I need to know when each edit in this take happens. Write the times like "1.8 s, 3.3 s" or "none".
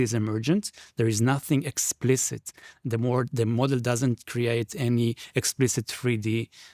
none